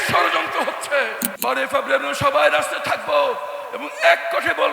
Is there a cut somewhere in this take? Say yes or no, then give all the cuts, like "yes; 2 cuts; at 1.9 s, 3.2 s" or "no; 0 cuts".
yes; 1 cut; at 1.3 s